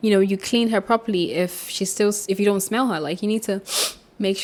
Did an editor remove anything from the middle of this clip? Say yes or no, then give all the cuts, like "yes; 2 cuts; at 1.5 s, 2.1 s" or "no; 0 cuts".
no; 0 cuts